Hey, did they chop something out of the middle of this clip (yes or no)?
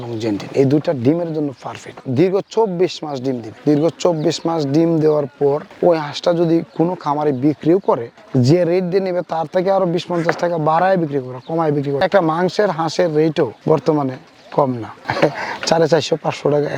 no